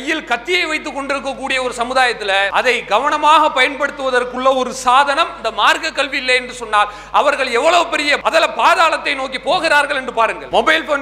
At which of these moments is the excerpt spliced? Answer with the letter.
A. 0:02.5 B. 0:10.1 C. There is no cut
A